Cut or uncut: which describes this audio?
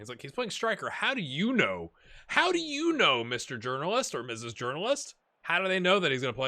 cut